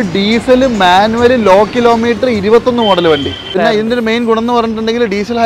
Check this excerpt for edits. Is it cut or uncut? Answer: cut